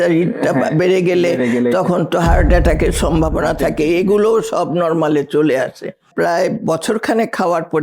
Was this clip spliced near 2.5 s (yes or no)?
no